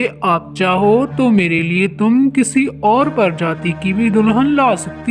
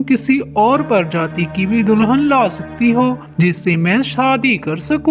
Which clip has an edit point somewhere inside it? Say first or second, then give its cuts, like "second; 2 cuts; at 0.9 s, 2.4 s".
second; 1 cut; at 3.8 s